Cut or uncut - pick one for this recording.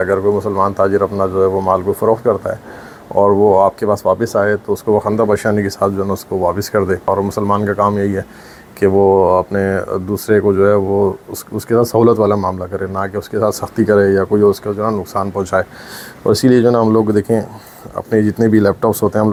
uncut